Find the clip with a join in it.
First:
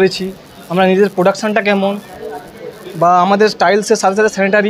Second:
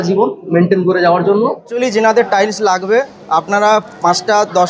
second; 1 cut; at 1.6 s

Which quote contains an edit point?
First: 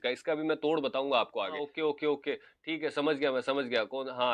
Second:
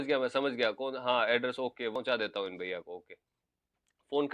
first; 1 cut; at 1.7 s

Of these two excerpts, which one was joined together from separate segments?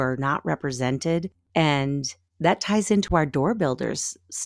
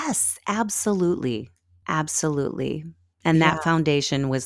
first; 1 cut; at 1.4 s

